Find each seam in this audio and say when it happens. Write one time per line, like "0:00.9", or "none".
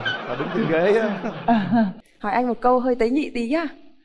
0:02.1